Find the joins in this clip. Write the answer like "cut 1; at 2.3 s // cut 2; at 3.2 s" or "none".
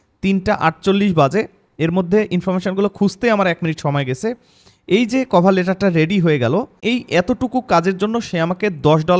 cut 1; at 6.8 s